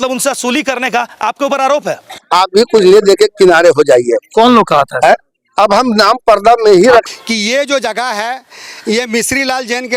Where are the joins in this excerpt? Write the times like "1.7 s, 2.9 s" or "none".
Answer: 2.1 s, 7.0 s